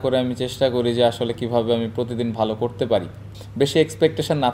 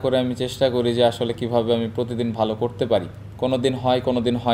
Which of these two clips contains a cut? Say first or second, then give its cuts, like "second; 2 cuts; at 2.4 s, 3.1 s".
first; 1 cut; at 3.2 s